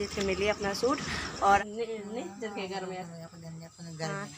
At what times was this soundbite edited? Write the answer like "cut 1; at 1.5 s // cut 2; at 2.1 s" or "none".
cut 1; at 1.6 s